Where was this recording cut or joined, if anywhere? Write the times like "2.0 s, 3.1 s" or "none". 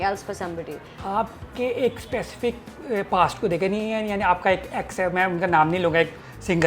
1.0 s